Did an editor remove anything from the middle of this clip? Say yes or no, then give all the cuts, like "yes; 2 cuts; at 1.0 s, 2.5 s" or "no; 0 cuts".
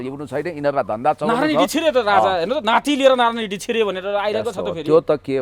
no; 0 cuts